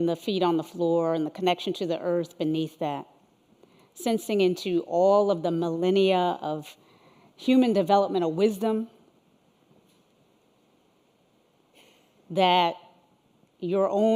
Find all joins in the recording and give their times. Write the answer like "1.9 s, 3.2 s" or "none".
none